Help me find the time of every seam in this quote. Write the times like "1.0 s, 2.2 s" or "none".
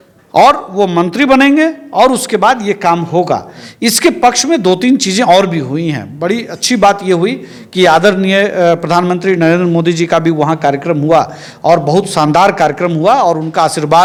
none

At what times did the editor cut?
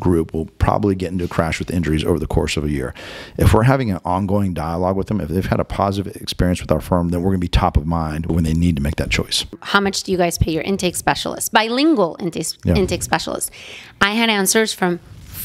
8.3 s, 9.6 s

